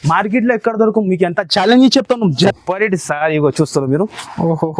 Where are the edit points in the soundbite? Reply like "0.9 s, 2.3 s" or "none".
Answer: 2.4 s